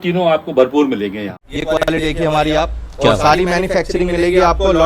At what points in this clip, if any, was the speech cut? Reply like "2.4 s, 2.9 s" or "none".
1.4 s